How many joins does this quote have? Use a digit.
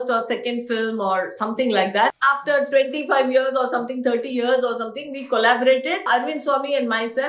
2